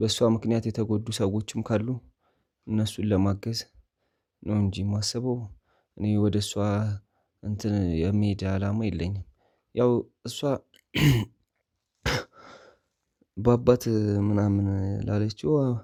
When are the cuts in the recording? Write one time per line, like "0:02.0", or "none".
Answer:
none